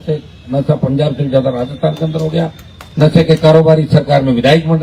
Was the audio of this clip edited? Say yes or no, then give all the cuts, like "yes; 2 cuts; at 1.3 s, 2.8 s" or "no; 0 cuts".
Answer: no; 0 cuts